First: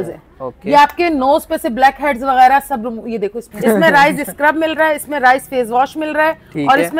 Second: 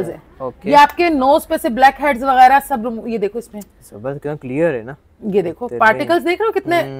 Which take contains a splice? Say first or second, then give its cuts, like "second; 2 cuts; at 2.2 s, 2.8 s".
first; 1 cut; at 3.5 s